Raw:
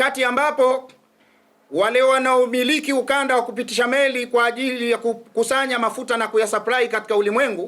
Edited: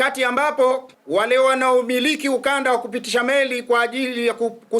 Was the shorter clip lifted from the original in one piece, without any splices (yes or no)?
no